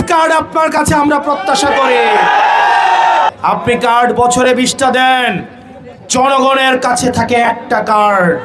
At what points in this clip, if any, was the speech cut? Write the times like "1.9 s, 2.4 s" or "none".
3.3 s